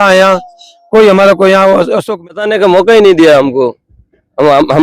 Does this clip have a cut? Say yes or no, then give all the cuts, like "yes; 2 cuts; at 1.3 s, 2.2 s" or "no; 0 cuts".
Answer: yes; 1 cut; at 2.3 s